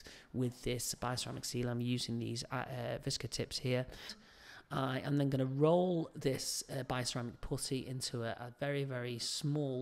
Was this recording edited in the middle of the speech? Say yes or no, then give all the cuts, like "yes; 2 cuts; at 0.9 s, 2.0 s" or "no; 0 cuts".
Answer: yes; 1 cut; at 4.2 s